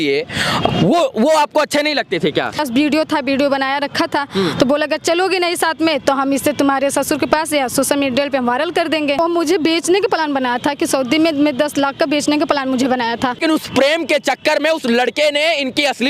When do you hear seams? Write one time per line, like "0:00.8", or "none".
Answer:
0:02.6
0:09.2
0:13.4